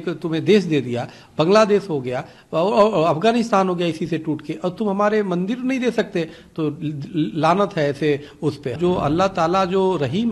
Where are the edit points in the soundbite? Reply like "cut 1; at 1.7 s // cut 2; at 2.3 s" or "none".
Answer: cut 1; at 8.8 s